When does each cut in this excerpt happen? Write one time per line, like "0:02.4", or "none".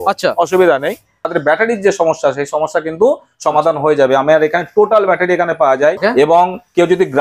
0:01.3
0:06.0